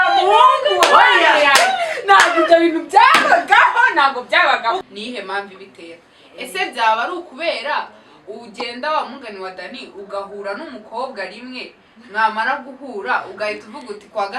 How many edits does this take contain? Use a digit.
1